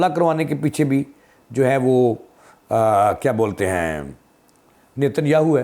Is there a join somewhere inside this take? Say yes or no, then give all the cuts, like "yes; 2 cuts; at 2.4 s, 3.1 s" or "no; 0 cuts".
no; 0 cuts